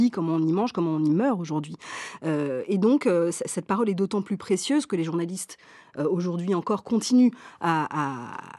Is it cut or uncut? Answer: uncut